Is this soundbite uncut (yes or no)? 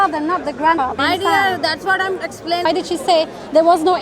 no